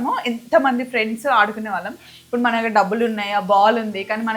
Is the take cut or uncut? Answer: uncut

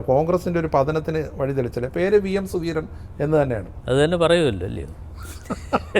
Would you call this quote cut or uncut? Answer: cut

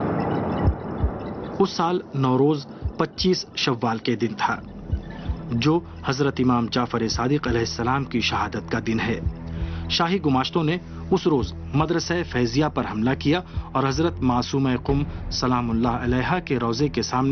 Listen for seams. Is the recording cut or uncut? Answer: uncut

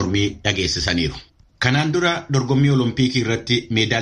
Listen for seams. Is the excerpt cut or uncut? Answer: cut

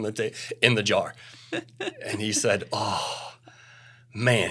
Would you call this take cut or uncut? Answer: uncut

